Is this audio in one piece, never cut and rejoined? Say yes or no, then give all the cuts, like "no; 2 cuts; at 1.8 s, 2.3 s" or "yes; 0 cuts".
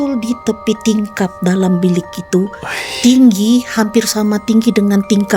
yes; 0 cuts